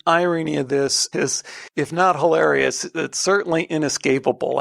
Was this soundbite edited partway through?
yes; 1 cut; at 1.1 s

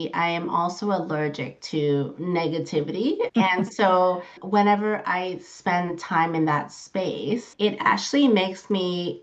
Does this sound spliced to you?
yes; 3 cuts; at 3.3 s, 4.3 s, 7.5 s

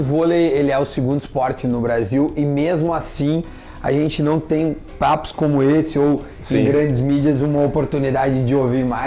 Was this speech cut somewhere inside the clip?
no; 0 cuts

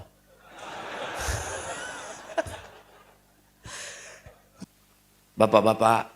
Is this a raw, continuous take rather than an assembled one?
no; 1 cut; at 4.6 s

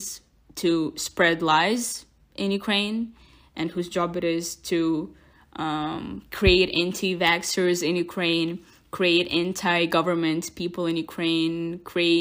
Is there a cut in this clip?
no; 0 cuts

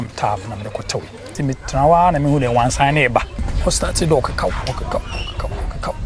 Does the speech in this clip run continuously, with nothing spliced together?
no; 2 cuts; at 1.3 s, 3.4 s

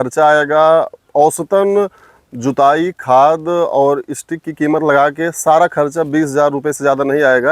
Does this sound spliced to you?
no; 0 cuts

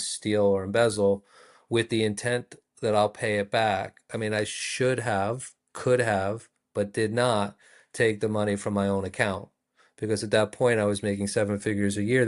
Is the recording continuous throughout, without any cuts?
yes; 0 cuts

